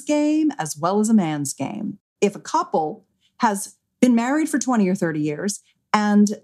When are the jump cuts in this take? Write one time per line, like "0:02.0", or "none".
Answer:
0:02.0